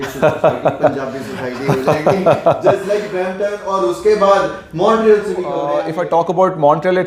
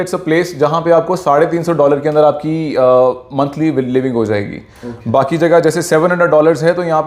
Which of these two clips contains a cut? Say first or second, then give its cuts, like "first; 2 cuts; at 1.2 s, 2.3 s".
first; 1 cut; at 5.7 s